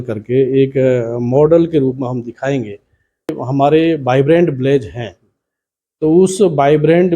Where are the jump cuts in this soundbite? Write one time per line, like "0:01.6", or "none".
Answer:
0:03.3